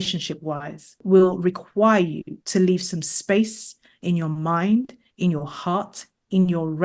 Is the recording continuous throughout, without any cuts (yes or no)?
no